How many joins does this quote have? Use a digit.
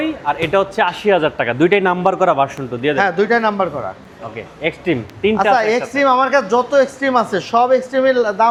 0